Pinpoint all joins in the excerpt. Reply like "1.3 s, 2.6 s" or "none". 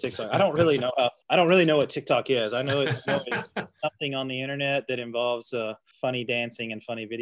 1.2 s